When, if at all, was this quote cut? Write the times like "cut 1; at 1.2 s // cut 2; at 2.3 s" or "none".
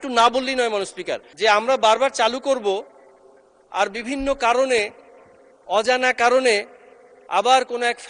cut 1; at 1.3 s